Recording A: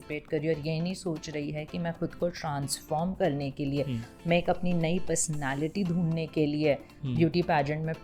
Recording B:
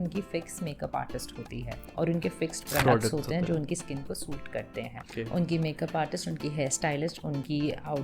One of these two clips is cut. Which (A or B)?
B